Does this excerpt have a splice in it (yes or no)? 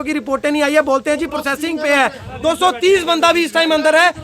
yes